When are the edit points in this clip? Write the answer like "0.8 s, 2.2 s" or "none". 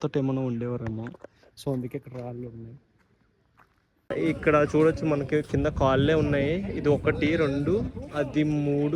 4.1 s